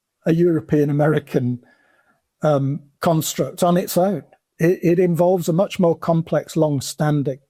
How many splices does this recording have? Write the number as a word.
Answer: zero